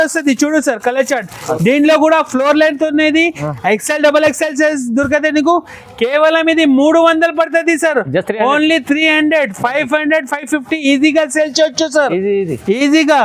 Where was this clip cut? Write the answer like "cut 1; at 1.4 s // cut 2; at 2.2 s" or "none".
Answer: none

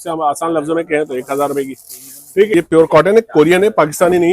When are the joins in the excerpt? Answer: cut 1; at 2.5 s

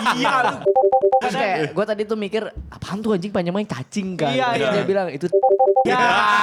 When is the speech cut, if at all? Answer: none

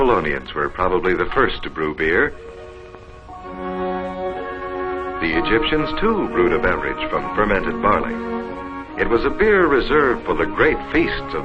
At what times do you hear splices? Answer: cut 1; at 2.9 s

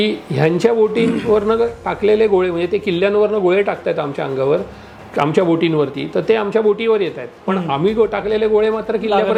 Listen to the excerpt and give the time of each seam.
none

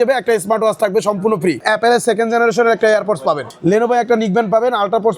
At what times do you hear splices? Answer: cut 1; at 1.6 s // cut 2; at 3.5 s

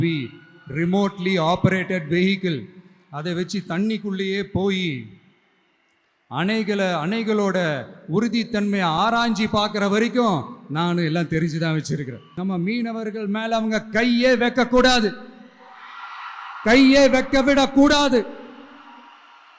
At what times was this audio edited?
cut 1; at 12.2 s

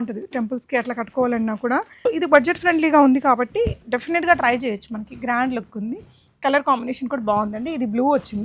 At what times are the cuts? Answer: cut 1; at 1.9 s

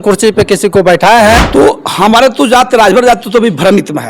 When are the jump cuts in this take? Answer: cut 1; at 1.4 s

